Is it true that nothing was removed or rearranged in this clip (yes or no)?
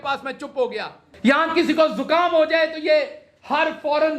no